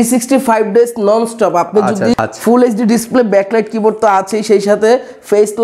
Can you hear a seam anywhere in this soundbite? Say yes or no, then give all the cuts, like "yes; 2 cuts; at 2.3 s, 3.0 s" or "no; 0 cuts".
yes; 1 cut; at 2.2 s